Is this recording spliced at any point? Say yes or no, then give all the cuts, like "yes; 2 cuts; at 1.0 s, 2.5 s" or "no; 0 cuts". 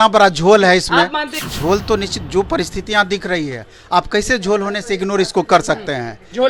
yes; 1 cut; at 1.4 s